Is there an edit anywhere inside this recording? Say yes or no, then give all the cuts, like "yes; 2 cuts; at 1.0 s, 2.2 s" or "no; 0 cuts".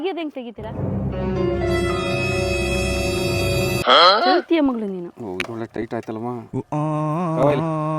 no; 0 cuts